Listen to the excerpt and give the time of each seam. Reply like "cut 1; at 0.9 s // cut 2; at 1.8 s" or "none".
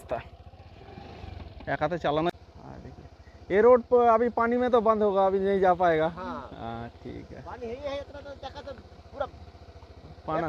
cut 1; at 2.3 s

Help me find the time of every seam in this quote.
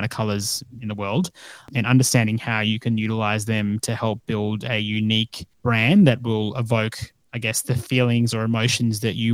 cut 1; at 1.7 s // cut 2; at 5.4 s

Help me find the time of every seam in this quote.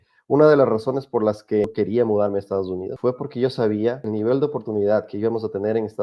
cut 1; at 1.7 s // cut 2; at 2.9 s // cut 3; at 4.0 s

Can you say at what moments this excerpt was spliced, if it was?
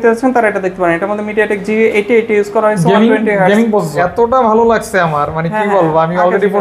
cut 1; at 4.0 s

